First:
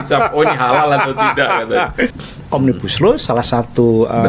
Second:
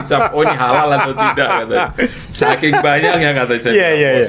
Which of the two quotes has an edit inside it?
first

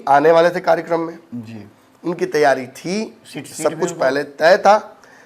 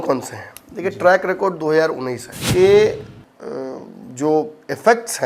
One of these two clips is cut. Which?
second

